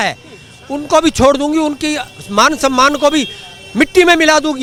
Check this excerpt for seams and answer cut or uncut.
uncut